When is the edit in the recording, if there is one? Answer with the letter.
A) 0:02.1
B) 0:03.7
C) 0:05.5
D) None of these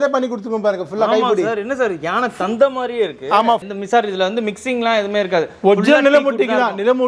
B